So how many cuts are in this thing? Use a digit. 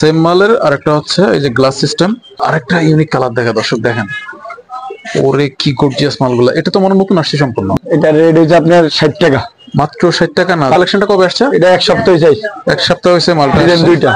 3